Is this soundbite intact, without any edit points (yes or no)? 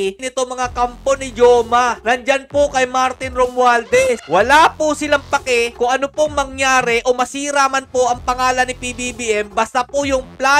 yes